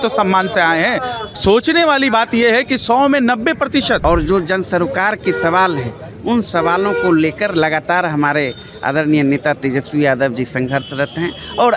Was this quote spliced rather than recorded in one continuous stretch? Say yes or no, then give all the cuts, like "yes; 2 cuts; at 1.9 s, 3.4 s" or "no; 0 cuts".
yes; 1 cut; at 4.0 s